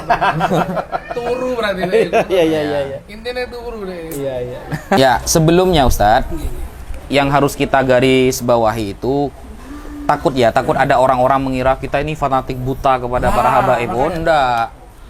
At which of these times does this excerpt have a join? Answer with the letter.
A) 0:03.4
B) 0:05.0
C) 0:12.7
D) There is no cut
B